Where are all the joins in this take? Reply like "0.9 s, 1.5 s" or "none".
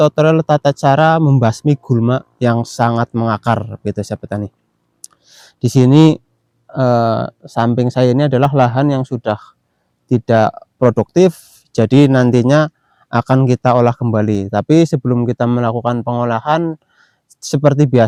none